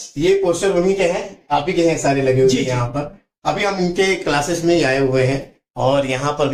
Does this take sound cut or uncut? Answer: uncut